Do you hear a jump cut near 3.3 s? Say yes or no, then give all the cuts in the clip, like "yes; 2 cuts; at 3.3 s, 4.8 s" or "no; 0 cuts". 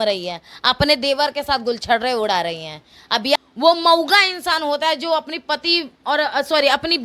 yes; 1 cut; at 3.3 s